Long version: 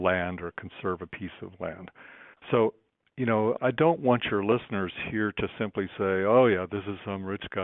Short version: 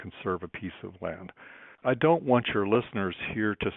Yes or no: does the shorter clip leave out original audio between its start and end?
yes